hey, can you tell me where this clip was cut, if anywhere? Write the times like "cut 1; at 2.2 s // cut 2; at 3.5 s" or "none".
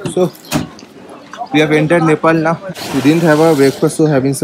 cut 1; at 2.7 s

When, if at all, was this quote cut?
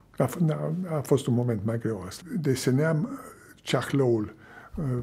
cut 1; at 2.2 s

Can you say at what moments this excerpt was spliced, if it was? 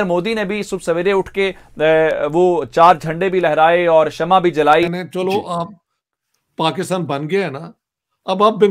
cut 1; at 4.9 s

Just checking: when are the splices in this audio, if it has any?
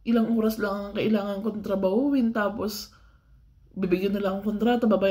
none

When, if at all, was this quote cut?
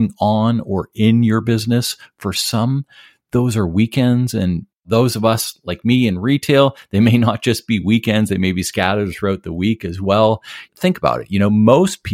cut 1; at 4.7 s

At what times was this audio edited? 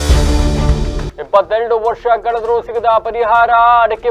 cut 1; at 1.1 s

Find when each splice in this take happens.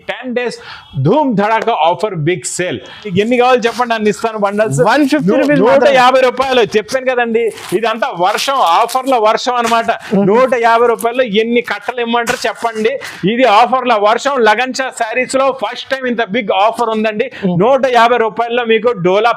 cut 1; at 3.1 s

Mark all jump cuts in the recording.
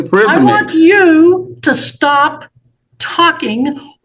none

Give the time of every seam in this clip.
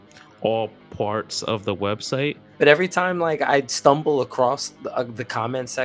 cut 1; at 2.4 s

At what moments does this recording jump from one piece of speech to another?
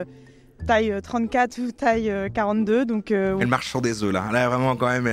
cut 1; at 3.4 s

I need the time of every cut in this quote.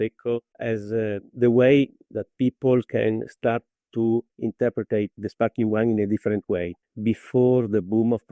cut 1; at 0.9 s

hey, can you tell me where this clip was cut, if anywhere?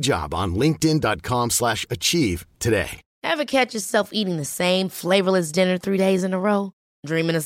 cut 1; at 3.0 s

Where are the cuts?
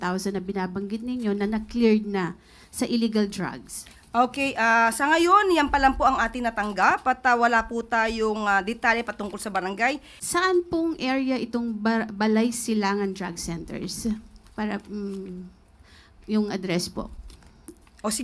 cut 1; at 10.1 s

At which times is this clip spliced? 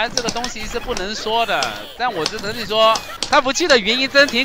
cut 1; at 3.1 s

